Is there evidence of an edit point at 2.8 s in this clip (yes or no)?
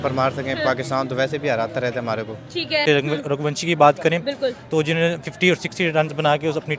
yes